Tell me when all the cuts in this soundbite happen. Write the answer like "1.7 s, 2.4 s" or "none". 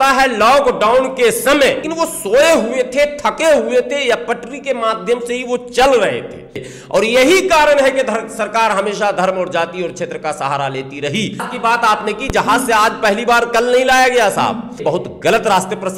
1.9 s, 6.6 s, 11.5 s, 14.8 s